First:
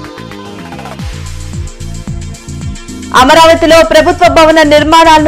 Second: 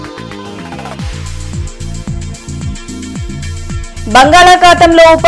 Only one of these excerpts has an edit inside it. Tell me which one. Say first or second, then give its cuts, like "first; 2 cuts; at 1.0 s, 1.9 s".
first; 1 cut; at 2.6 s